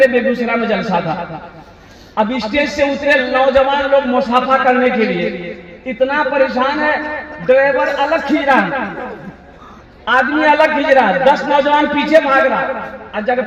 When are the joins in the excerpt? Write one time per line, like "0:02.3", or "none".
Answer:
none